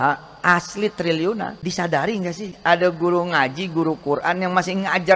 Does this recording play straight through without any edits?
no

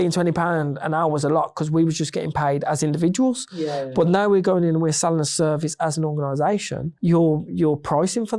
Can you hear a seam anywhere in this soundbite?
no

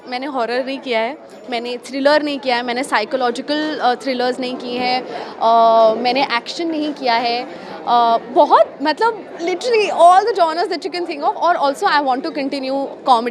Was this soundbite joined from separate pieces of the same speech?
no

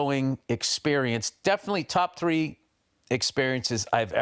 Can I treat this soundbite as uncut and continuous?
yes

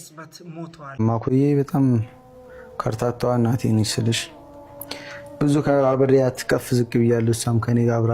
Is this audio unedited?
no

